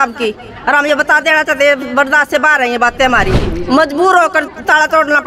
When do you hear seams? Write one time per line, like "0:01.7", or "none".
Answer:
0:03.4